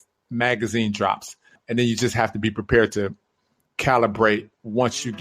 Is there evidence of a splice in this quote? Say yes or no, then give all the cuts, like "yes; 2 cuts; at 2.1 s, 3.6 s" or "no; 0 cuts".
yes; 1 cut; at 1.6 s